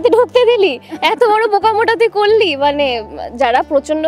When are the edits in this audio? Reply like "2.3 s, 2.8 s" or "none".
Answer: none